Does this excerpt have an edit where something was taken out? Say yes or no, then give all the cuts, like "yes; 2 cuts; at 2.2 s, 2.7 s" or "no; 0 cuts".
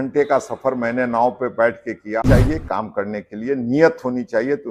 yes; 1 cut; at 2.2 s